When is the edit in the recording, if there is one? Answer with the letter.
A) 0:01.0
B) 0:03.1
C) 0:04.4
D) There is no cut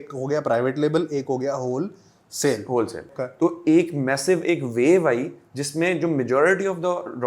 B